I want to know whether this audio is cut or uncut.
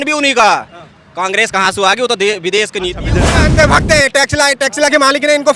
cut